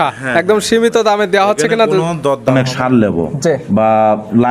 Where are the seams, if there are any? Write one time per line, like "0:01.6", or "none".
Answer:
0:02.5